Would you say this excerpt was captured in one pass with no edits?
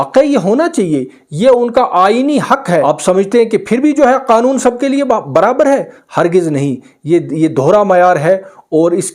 no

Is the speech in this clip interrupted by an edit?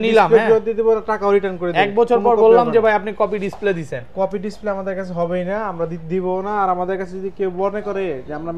no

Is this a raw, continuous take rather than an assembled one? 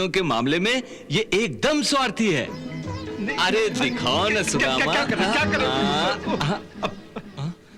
no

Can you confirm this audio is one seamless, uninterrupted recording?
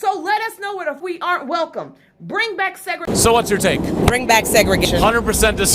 no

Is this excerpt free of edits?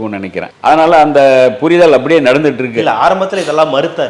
yes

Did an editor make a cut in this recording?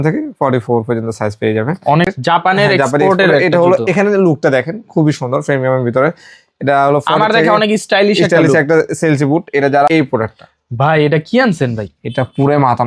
yes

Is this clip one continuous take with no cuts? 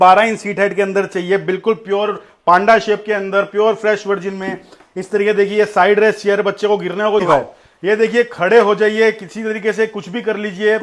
no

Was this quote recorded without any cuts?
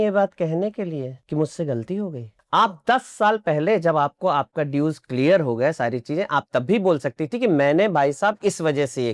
no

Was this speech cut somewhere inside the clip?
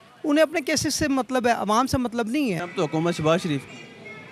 yes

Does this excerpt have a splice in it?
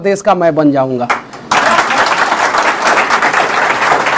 no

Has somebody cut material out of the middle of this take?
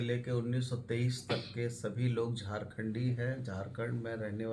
no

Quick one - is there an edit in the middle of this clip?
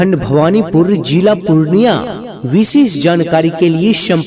yes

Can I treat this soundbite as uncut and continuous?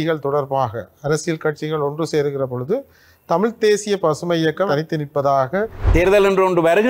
no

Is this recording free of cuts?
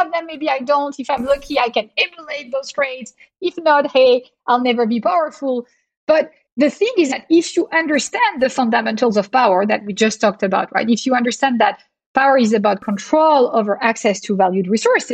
no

